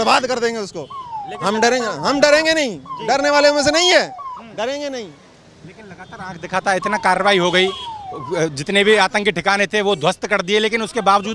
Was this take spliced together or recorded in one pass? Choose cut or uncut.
uncut